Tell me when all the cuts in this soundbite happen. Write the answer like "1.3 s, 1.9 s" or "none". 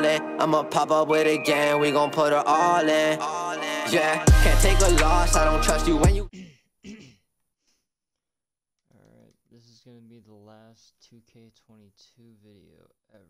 6.3 s